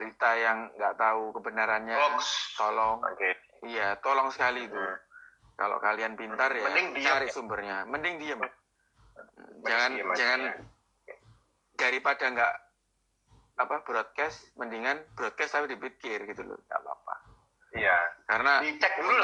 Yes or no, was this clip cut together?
no